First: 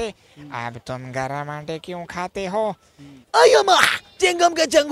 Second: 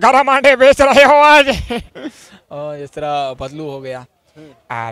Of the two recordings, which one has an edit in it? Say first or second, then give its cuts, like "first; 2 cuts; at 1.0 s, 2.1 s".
first; 1 cut; at 3.2 s